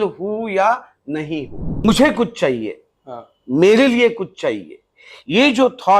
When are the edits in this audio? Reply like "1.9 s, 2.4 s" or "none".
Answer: 1.8 s